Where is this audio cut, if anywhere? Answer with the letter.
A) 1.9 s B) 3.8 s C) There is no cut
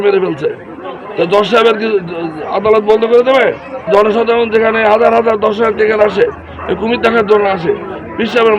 B